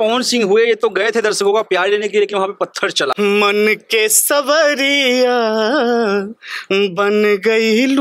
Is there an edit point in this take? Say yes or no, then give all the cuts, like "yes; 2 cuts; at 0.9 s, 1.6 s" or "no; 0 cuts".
yes; 1 cut; at 3.2 s